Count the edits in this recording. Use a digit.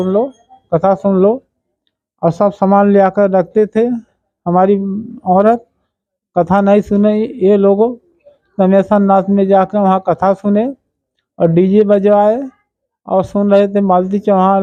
0